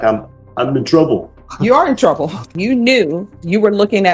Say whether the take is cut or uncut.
cut